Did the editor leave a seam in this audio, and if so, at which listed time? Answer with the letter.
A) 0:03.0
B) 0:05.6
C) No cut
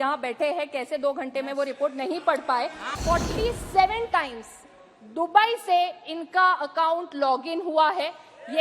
A